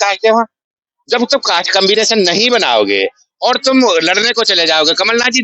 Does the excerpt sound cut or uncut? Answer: uncut